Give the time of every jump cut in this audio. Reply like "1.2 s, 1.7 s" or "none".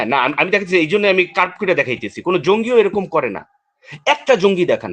none